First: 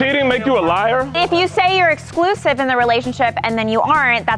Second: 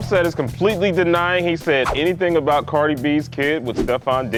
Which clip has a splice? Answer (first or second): first